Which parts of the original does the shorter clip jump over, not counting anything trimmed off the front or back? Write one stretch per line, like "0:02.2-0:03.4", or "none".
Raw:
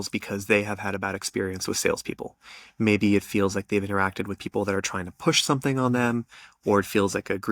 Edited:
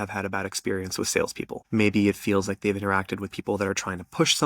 0:02.2-0:02.6